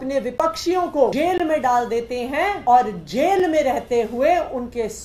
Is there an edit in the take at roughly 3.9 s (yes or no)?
no